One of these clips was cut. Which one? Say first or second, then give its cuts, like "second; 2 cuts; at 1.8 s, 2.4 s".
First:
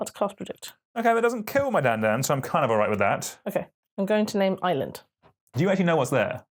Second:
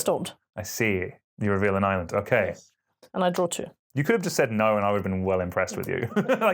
second; 1 cut; at 1.2 s